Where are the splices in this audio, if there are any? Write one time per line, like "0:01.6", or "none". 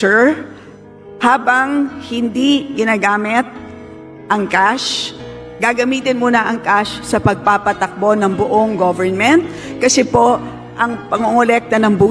none

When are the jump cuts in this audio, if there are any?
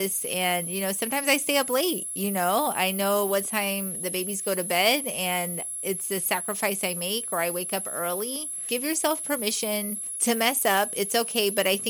0:08.7
0:10.0

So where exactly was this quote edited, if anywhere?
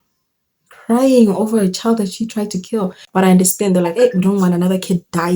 0:03.0

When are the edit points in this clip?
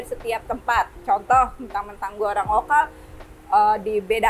none

